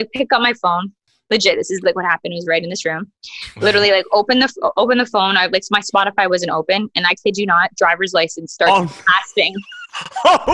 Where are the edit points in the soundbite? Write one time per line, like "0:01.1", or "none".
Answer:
none